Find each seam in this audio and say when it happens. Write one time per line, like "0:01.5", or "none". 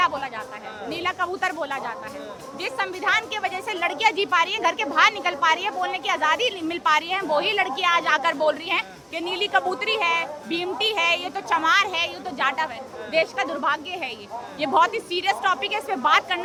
none